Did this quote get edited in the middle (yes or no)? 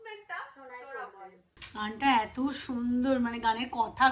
yes